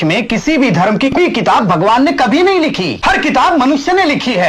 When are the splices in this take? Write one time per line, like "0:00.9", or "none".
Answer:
0:01.2
0:02.9